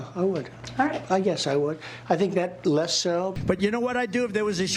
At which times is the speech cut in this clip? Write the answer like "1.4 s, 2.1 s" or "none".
3.4 s